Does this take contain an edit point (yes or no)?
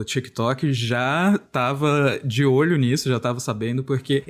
no